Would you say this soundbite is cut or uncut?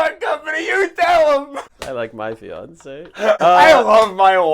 cut